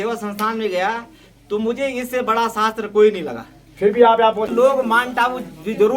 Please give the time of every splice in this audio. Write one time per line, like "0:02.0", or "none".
0:04.5